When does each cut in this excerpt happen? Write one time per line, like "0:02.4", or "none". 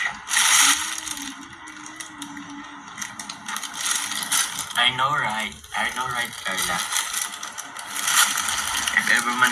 none